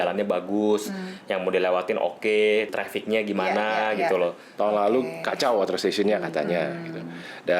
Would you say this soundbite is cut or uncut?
cut